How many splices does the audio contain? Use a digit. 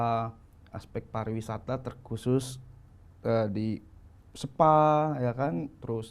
0